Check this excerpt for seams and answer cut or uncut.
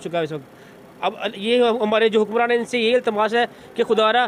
uncut